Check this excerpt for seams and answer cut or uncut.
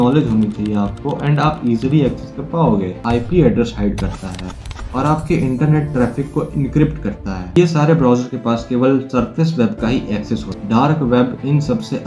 cut